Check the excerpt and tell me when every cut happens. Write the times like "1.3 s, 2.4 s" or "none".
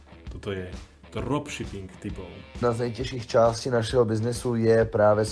2.6 s